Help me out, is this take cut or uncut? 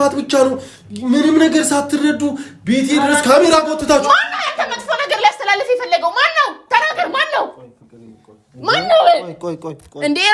uncut